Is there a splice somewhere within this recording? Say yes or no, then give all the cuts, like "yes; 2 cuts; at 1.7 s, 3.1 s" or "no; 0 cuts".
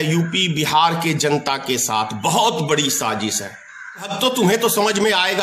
yes; 1 cut; at 4.1 s